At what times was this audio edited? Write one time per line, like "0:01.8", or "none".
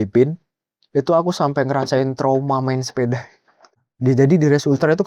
0:03.8